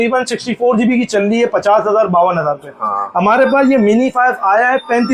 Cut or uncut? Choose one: uncut